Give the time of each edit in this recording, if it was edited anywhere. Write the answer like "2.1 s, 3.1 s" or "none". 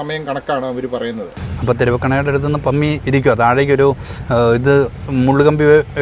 1.3 s

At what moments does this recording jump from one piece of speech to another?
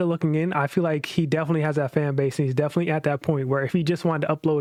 none

